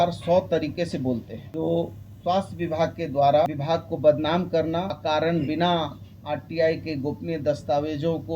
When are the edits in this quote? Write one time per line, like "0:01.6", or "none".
0:01.4
0:03.5
0:04.9